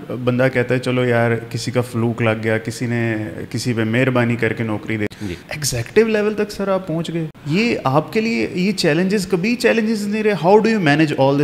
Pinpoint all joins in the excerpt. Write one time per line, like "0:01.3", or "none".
0:05.1
0:07.4